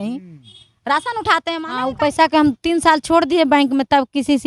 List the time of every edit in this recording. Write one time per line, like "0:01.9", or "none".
0:01.9